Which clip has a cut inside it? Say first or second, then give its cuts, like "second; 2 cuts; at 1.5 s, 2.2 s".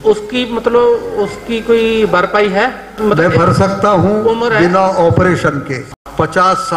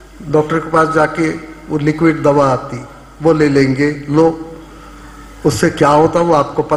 first; 2 cuts; at 2.9 s, 5.9 s